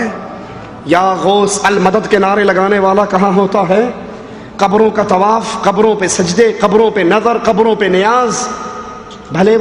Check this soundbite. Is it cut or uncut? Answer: uncut